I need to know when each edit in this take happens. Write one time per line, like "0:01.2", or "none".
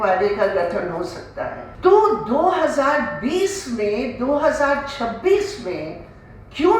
0:01.6